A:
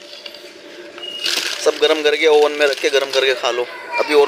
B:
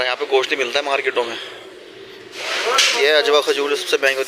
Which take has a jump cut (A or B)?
B